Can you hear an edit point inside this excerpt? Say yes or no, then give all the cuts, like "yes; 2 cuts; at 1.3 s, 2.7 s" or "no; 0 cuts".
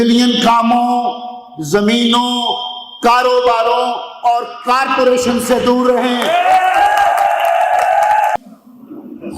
yes; 1 cut; at 8.4 s